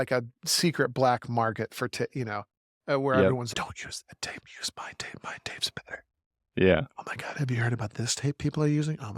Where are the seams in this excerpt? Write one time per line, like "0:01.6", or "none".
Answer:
0:03.5